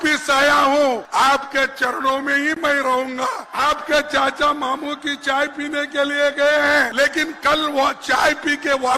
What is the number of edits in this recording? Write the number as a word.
three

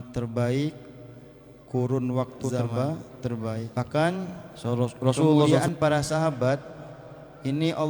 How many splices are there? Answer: three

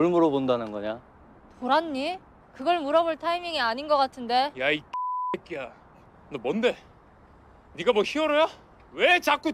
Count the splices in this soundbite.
zero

